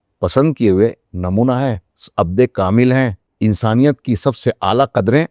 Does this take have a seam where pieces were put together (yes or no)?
yes